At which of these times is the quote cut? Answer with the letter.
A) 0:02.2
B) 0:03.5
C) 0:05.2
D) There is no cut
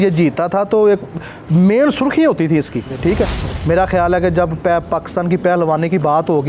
B